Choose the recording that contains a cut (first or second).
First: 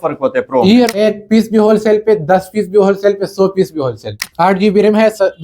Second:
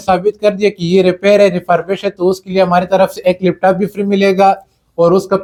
first